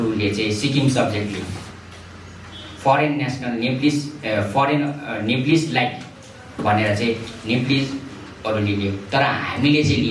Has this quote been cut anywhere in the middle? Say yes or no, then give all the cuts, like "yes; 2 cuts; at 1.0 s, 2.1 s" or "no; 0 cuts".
no; 0 cuts